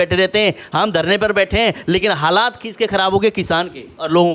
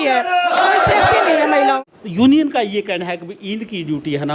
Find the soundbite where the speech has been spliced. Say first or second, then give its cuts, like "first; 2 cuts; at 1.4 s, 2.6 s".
second; 1 cut; at 1.8 s